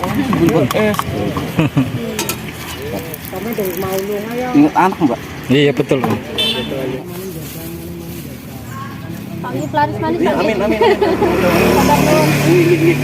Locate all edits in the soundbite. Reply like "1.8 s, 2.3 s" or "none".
7.0 s